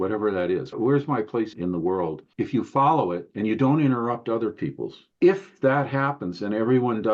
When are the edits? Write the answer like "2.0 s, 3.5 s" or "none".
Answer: 5.0 s